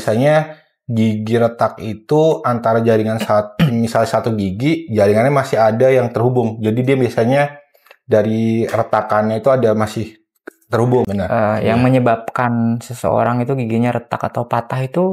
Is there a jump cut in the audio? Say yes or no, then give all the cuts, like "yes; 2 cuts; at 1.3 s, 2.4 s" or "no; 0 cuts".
yes; 1 cut; at 11.1 s